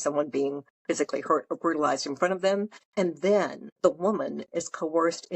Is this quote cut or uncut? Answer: cut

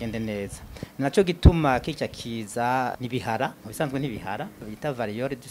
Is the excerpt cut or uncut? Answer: cut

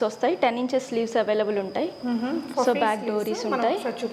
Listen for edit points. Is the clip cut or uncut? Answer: uncut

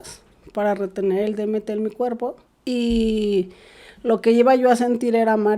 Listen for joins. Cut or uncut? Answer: cut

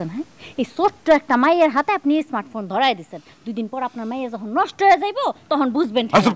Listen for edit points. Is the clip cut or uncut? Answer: uncut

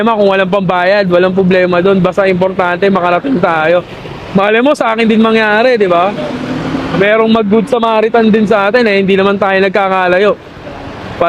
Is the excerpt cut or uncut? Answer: uncut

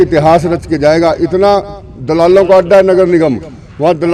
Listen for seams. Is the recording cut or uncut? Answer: uncut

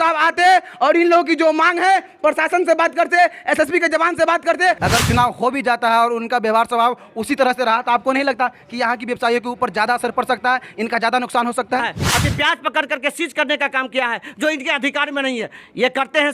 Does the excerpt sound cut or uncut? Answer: cut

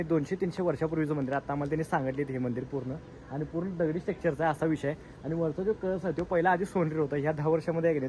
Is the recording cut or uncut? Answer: uncut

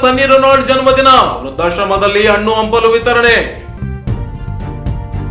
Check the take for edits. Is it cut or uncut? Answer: uncut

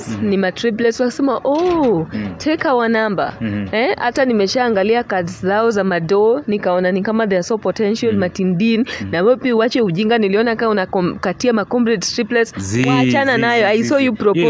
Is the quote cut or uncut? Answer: uncut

